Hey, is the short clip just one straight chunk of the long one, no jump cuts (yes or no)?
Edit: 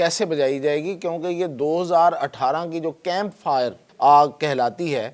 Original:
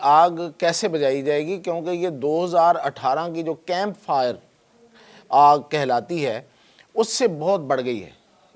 no